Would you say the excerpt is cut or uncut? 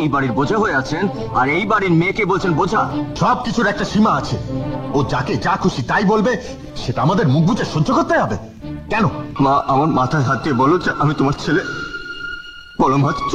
cut